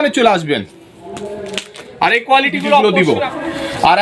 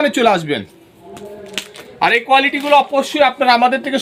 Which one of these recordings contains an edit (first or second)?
first